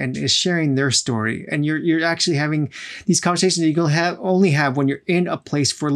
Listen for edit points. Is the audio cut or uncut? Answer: uncut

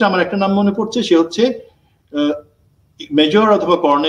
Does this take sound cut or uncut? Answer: uncut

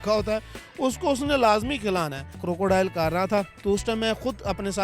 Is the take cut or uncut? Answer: cut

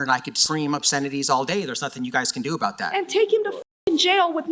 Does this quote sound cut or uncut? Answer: cut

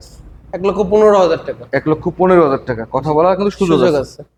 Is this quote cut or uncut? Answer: uncut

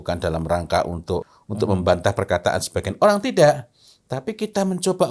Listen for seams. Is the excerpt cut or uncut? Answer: cut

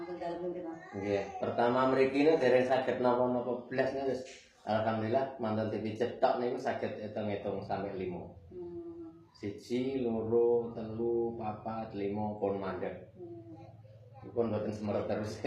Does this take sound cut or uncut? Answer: uncut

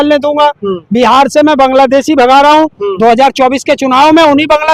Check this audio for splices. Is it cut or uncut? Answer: uncut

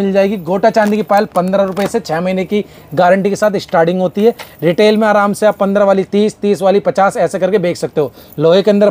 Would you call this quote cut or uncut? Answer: uncut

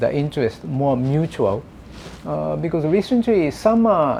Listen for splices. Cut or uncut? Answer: uncut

